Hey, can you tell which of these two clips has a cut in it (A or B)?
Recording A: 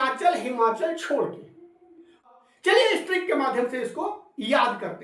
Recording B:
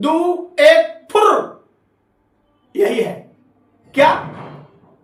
A